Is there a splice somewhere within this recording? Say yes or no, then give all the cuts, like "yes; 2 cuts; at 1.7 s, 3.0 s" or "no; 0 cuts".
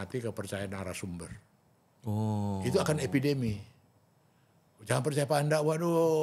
no; 0 cuts